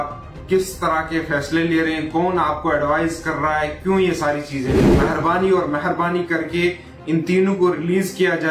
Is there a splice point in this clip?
yes; 1 cut; at 4.8 s

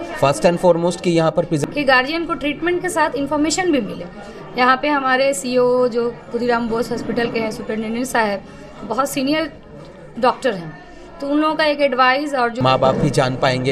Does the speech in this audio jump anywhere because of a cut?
yes; 2 cuts; at 1.6 s, 12.6 s

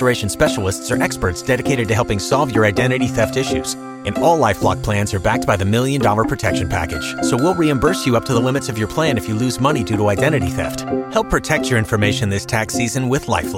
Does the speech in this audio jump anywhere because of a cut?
no; 0 cuts

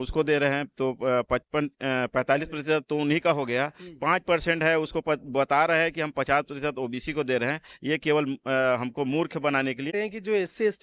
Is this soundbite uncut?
no; 1 cut; at 9.9 s

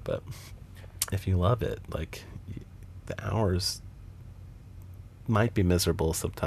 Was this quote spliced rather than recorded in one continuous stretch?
no; 0 cuts

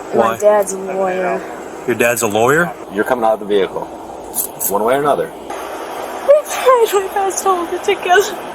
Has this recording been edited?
yes; 2 cuts; at 2.8 s, 5.5 s

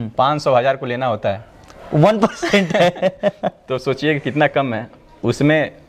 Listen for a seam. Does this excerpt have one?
no; 0 cuts

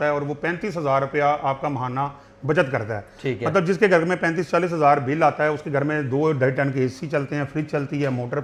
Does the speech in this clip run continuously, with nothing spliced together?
yes; 0 cuts

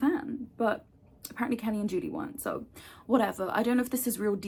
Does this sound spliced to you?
no; 0 cuts

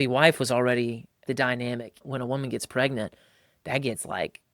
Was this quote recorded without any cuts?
no; 2 cuts; at 1.2 s, 2.0 s

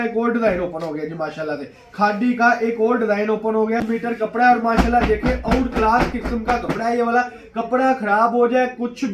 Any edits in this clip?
yes; 1 cut; at 3.8 s

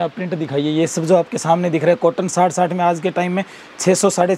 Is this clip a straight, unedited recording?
yes; 0 cuts

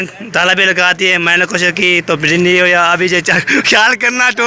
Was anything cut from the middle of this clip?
no; 0 cuts

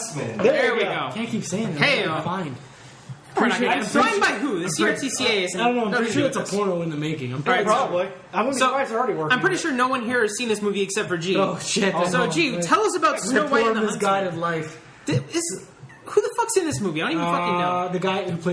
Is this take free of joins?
no; 1 cut; at 5.2 s

